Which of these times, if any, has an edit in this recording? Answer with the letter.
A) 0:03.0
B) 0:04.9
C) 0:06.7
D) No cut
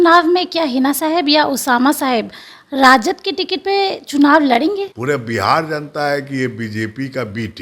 B